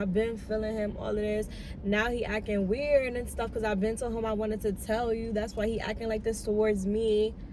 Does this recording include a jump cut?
no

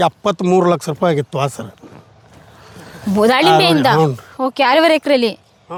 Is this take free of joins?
yes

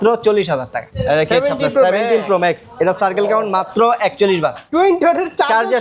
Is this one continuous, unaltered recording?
no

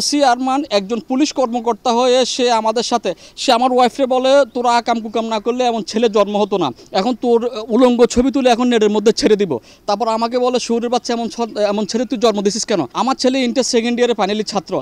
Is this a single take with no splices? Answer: yes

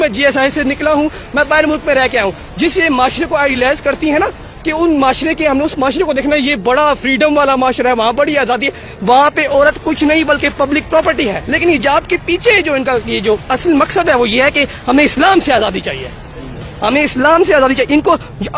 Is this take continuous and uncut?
no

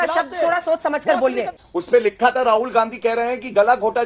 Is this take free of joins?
no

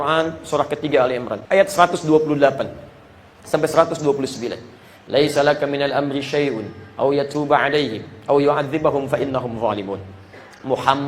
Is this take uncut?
no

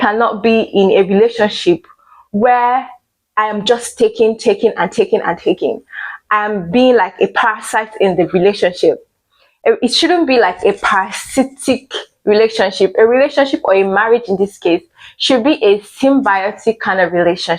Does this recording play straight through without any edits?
yes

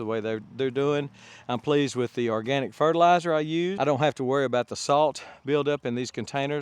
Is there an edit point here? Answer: yes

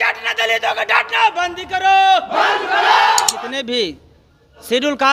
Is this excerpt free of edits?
no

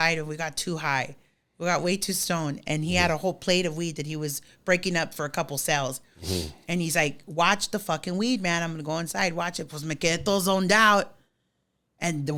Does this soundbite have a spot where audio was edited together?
no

